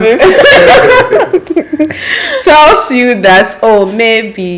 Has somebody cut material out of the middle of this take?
no; 0 cuts

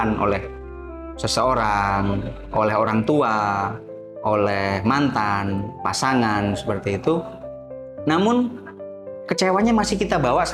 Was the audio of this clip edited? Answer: no; 0 cuts

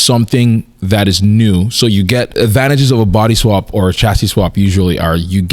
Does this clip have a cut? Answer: yes; 1 cut; at 2.3 s

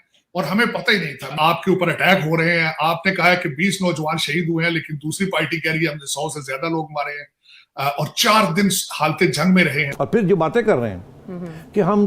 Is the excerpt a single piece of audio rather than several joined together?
no; 2 cuts; at 1.3 s, 9.9 s

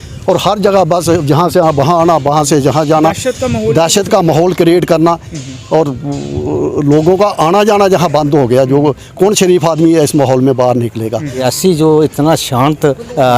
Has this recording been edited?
yes; 1 cut; at 11.4 s

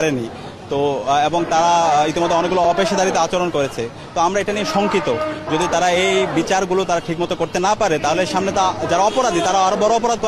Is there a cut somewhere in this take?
no; 0 cuts

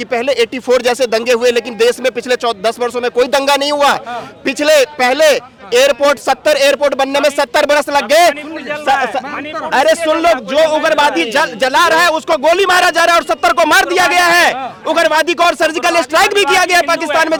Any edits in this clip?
no; 0 cuts

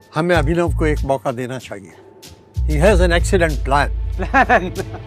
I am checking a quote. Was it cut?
no; 0 cuts

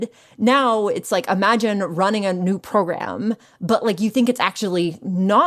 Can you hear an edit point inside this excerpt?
no; 0 cuts

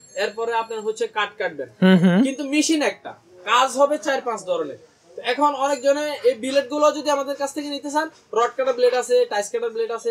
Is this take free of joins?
yes; 0 cuts

